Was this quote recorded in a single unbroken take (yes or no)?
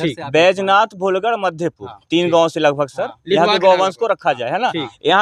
yes